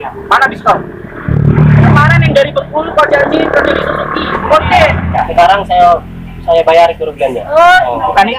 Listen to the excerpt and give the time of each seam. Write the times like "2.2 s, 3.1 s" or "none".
1.3 s, 5.1 s

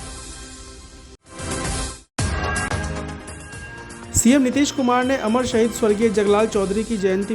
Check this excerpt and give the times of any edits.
1.0 s

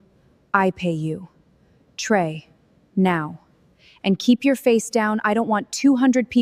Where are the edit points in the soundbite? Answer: none

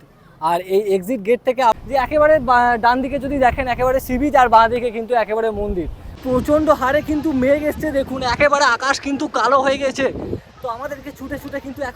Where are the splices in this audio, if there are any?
1.8 s, 6.2 s

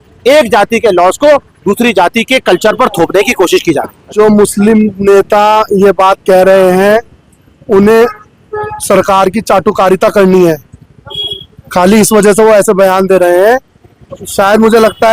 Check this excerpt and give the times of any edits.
4.1 s

